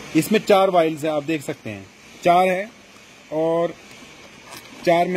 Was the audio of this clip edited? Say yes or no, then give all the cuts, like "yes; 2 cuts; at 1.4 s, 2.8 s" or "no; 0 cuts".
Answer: no; 0 cuts